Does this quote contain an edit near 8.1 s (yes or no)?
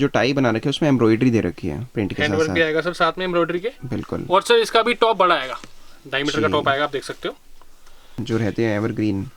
yes